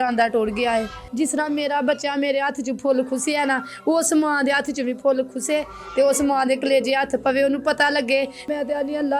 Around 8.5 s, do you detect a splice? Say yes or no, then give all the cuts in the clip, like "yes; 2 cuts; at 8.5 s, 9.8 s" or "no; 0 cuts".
yes; 2 cuts; at 1.0 s, 8.5 s